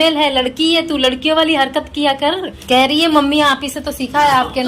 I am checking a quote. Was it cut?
yes; 1 cut; at 2.6 s

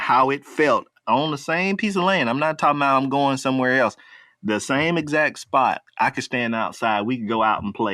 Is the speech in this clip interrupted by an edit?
yes; 2 cuts; at 1.0 s, 5.8 s

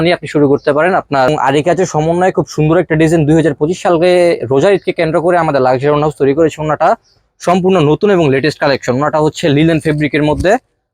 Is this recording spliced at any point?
yes; 1 cut; at 1.3 s

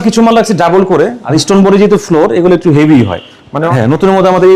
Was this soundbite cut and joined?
yes; 2 cuts; at 1.2 s, 3.7 s

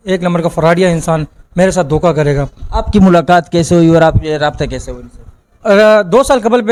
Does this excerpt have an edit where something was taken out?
no; 0 cuts

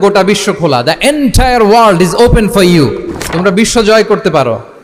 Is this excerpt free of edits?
yes; 0 cuts

